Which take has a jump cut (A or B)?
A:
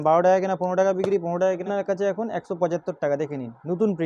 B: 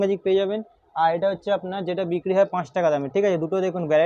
A